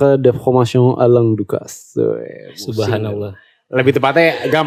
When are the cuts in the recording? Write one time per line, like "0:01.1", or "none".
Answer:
none